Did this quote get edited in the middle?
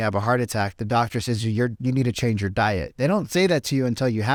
no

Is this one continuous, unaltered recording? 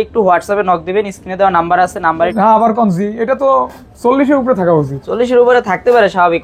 no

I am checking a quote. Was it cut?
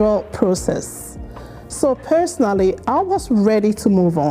no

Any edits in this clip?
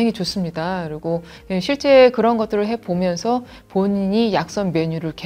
yes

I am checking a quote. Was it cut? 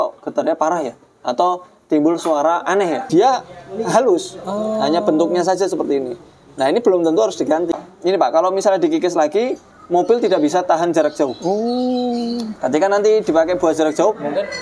yes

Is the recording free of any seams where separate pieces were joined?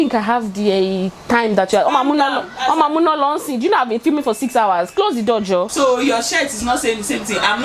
yes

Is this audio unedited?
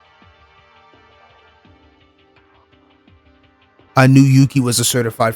no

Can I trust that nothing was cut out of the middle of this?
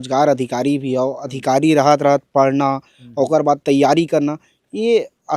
yes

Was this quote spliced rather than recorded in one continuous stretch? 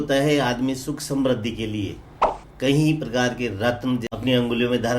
yes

